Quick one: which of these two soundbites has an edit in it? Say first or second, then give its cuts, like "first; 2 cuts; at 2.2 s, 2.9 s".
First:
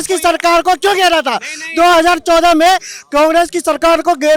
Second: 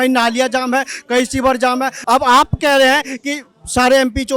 second; 1 cut; at 1.9 s